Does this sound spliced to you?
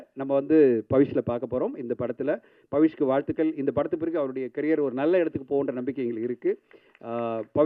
no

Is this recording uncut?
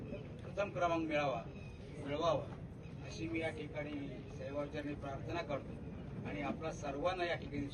yes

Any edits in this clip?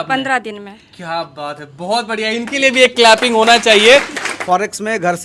yes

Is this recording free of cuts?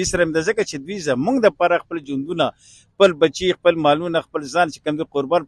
yes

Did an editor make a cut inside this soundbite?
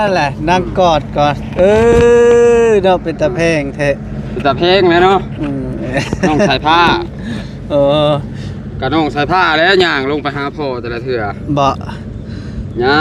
no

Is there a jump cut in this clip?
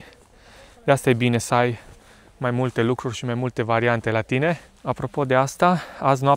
yes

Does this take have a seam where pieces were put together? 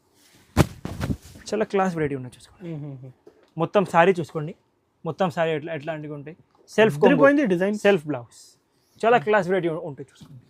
no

